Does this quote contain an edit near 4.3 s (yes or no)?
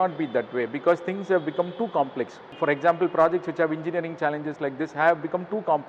no